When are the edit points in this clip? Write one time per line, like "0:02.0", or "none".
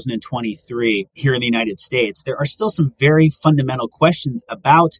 0:01.1